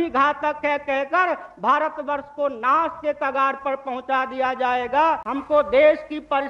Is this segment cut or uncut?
cut